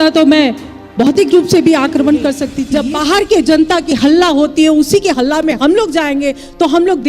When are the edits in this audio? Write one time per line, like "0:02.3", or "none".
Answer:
0:02.5